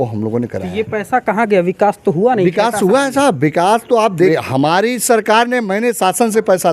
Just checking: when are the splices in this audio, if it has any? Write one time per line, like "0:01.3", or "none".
0:04.3